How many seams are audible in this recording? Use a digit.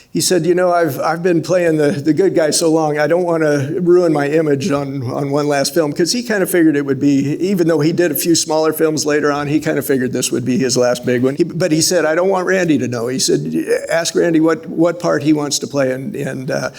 1